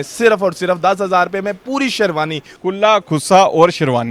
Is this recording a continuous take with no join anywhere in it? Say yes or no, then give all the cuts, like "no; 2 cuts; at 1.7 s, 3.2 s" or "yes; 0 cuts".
yes; 0 cuts